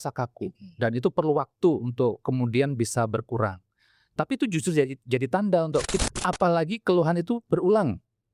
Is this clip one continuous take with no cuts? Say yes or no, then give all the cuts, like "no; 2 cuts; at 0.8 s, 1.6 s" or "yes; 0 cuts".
no; 1 cut; at 6.0 s